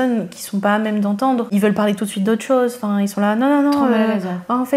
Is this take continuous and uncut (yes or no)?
yes